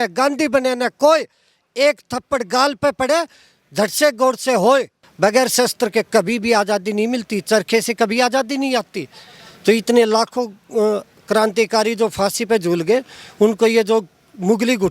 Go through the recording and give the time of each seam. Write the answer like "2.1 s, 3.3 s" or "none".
5.0 s